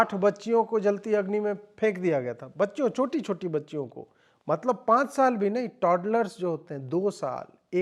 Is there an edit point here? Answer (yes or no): no